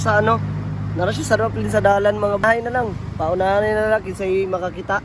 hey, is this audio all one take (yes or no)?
no